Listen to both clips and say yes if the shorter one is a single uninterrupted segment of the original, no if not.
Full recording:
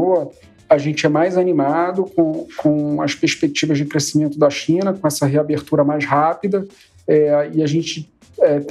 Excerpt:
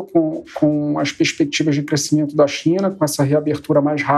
yes